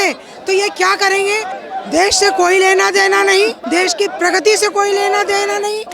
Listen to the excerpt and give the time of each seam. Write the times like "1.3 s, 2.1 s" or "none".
1.6 s, 3.6 s